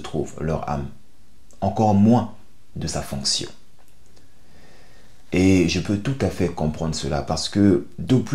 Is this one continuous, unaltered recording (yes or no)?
yes